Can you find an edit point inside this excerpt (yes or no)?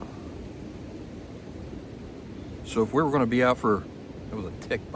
no